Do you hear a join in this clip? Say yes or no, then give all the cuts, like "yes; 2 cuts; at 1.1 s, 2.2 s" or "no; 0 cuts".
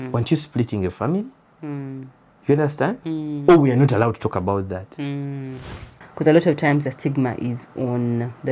yes; 1 cut; at 6.0 s